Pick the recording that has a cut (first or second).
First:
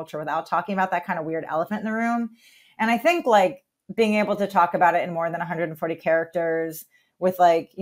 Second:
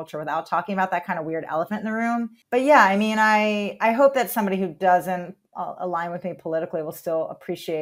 second